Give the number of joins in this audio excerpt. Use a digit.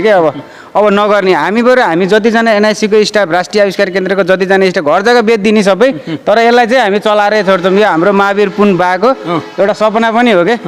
0